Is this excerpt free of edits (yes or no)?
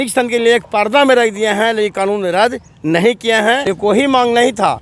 yes